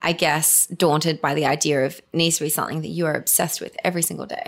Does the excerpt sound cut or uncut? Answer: cut